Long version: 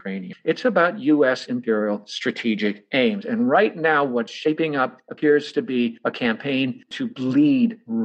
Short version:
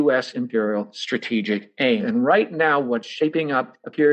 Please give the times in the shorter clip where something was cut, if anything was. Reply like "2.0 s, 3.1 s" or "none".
2.0 s